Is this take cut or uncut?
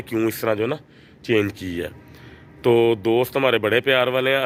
uncut